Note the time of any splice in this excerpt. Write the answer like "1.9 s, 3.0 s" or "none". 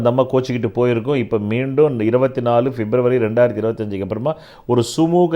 none